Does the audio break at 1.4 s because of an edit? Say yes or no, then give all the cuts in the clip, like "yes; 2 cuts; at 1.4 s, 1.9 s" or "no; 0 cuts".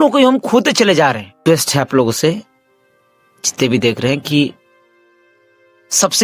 yes; 1 cut; at 1.4 s